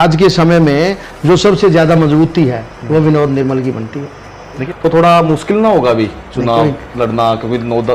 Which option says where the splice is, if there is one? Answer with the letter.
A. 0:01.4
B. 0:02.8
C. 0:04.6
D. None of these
C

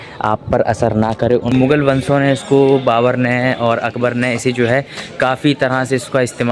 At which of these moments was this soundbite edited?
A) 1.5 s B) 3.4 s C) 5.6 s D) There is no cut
A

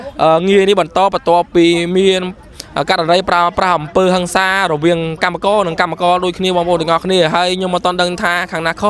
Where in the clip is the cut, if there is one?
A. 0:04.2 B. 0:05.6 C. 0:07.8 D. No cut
D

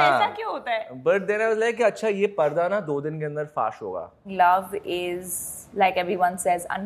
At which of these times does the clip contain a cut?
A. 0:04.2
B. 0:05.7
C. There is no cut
A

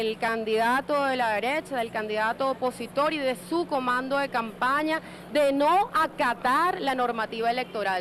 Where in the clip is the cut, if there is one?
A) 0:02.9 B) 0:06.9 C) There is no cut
A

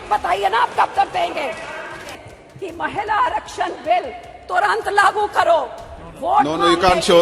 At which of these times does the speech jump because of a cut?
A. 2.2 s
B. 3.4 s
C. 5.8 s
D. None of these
A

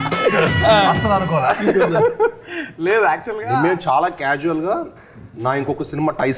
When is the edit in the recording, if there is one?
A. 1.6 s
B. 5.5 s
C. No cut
C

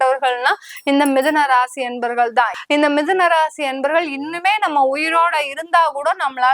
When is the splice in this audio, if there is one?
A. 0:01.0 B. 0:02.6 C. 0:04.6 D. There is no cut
B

